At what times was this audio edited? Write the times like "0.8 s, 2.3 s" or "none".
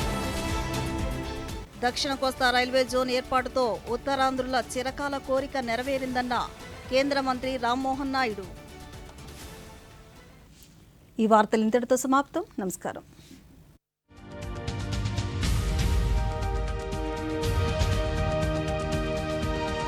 none